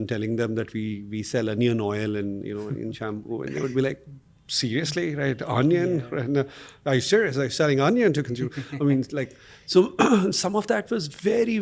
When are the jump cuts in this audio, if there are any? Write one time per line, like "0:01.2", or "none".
none